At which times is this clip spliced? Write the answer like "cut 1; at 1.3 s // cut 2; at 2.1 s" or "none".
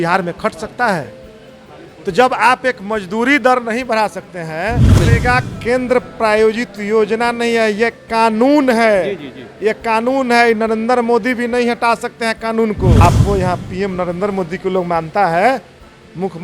cut 1; at 5.0 s // cut 2; at 13.0 s